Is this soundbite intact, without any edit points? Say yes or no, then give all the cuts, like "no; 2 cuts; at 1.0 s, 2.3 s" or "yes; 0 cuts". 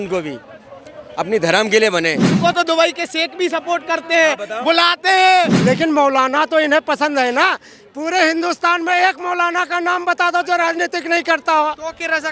no; 2 cuts; at 2.4 s, 5.6 s